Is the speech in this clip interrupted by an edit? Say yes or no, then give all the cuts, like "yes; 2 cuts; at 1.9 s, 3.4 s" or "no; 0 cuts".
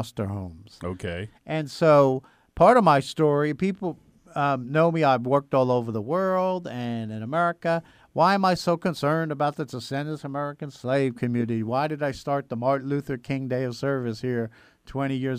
no; 0 cuts